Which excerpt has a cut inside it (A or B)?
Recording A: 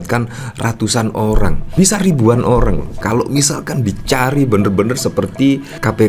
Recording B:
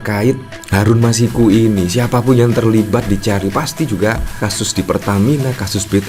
A